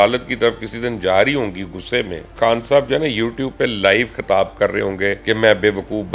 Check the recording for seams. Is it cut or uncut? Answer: cut